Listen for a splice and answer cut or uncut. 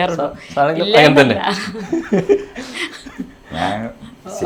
uncut